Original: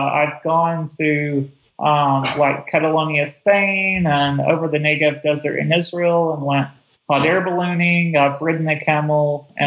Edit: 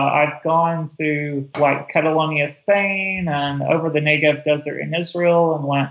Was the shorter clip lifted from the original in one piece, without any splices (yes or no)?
no